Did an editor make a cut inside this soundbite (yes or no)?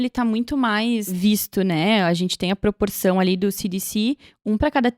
yes